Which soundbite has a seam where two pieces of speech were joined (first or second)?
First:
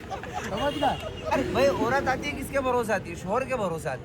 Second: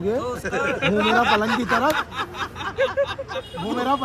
first